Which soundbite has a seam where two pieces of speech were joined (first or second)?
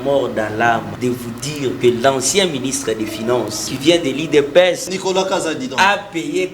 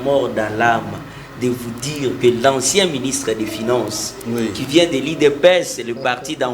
first